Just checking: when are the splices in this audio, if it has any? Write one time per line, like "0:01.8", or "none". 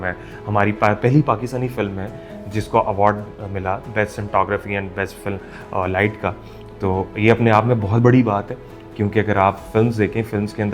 none